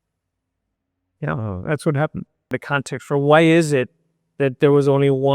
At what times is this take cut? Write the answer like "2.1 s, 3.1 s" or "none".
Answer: 2.6 s